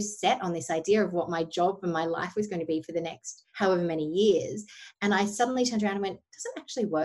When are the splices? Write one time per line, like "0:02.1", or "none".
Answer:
none